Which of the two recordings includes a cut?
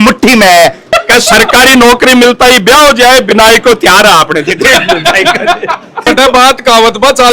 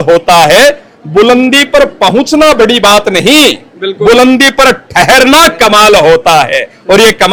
first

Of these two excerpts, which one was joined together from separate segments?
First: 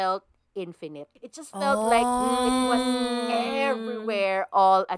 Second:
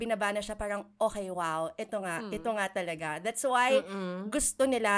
first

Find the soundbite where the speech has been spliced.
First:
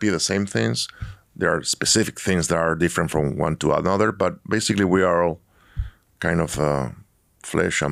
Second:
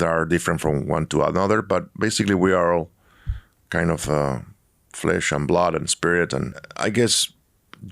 second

